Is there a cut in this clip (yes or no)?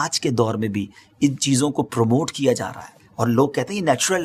no